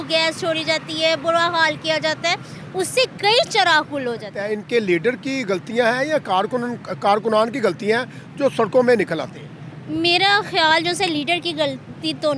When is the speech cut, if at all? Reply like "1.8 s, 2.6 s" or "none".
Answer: 4.4 s